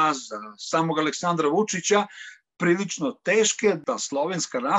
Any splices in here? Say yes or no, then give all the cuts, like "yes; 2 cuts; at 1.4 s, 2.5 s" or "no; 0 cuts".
yes; 1 cut; at 3.8 s